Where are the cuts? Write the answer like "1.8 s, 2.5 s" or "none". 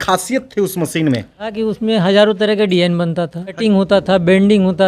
1.5 s, 3.6 s